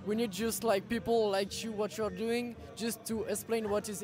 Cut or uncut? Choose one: uncut